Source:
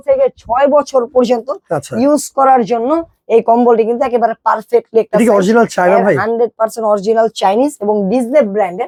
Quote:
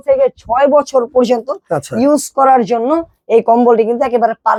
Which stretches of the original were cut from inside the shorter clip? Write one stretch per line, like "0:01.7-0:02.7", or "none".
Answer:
none